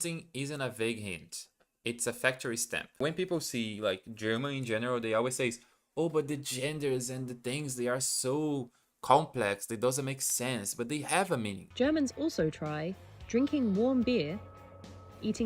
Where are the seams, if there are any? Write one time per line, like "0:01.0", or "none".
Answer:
0:02.8
0:11.6